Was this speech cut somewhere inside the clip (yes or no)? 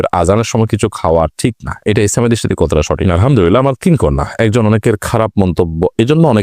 yes